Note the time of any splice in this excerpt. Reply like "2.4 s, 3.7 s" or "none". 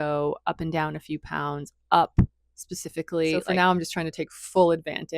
3.4 s